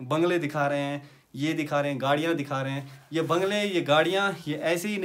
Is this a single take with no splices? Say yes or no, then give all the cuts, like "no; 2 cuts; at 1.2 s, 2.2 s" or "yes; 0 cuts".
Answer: yes; 0 cuts